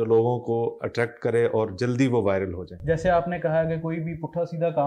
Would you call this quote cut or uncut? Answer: cut